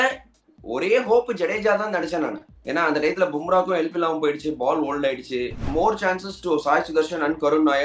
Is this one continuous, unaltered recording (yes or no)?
no